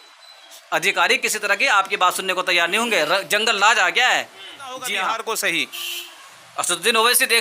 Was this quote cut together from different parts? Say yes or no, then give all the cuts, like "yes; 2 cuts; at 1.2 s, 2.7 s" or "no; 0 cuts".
yes; 1 cut; at 4.9 s